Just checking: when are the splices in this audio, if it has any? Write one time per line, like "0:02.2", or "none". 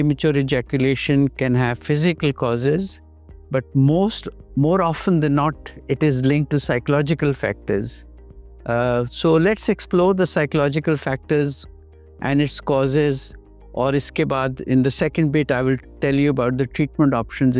none

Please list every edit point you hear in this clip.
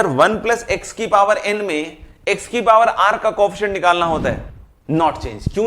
0:04.5

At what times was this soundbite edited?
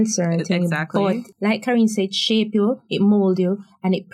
0:01.3

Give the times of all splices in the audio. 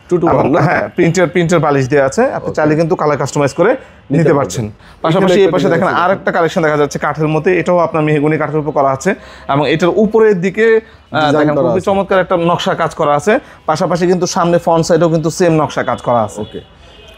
none

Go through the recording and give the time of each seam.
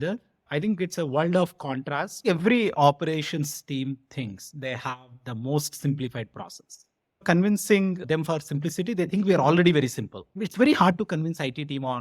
0:02.2

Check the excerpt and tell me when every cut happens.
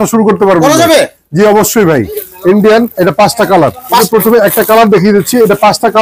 0:02.2
0:04.1

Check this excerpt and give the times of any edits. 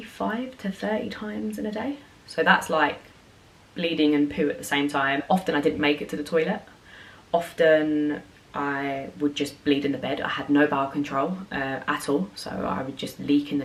none

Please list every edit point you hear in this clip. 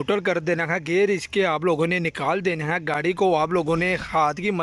none

